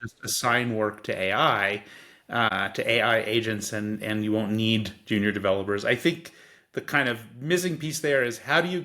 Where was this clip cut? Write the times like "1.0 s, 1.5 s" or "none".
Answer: 2.5 s